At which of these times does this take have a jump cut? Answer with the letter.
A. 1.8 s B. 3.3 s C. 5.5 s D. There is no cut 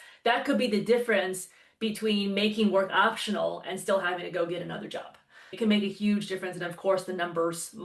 C